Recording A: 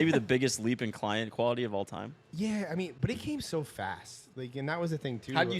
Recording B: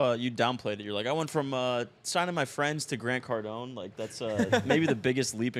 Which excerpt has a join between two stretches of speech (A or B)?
A